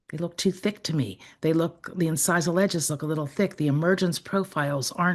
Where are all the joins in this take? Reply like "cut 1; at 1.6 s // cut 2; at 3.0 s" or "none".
none

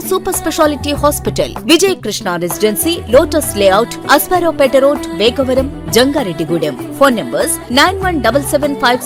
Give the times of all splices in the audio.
none

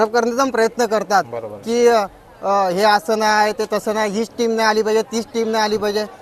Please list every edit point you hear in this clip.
none

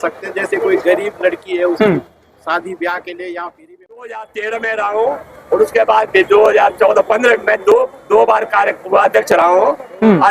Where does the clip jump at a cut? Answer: cut 1; at 4.2 s

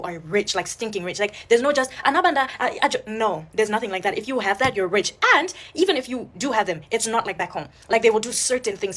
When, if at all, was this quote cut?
none

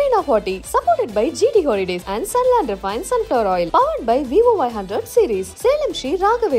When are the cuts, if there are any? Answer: none

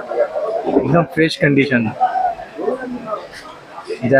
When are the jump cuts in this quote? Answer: none

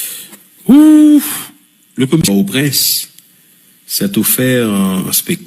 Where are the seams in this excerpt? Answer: cut 1; at 2.2 s

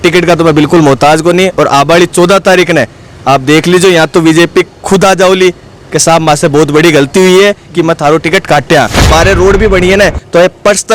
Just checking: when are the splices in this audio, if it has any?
cut 1; at 9.0 s

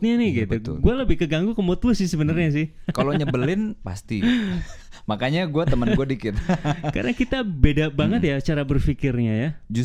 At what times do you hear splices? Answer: none

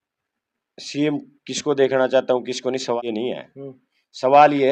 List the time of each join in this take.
none

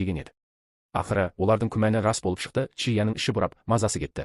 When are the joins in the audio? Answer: cut 1; at 2.2 s

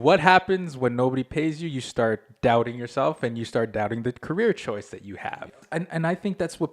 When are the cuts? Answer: cut 1; at 5.5 s

